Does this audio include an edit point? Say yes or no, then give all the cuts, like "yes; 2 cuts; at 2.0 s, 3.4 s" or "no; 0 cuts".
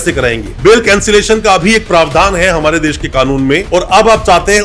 yes; 1 cut; at 3.6 s